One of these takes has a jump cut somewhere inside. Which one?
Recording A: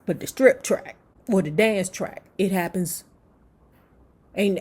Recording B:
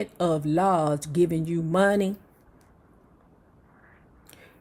A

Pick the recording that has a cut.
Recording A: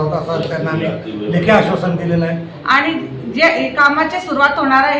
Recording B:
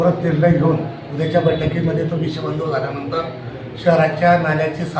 A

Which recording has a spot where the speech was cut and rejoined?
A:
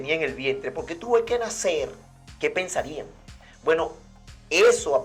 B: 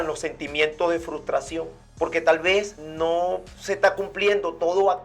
B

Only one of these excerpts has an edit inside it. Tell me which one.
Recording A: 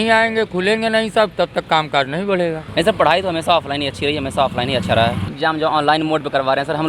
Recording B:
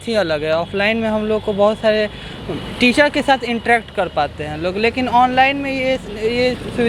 A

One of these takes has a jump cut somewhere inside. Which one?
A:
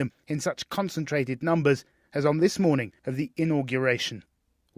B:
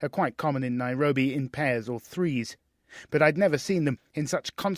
B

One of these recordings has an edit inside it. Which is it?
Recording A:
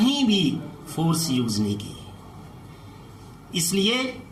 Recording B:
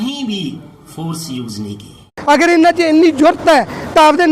B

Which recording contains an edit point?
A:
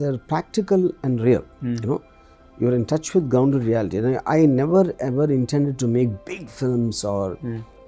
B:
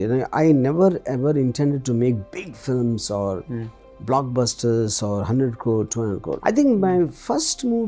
B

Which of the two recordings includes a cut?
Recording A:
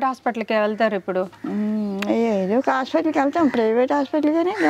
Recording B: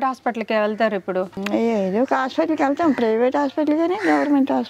B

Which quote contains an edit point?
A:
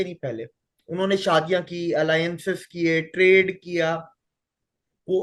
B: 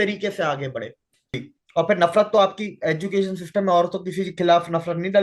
B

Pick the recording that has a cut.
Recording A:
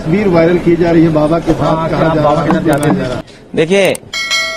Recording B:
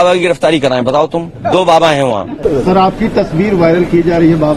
B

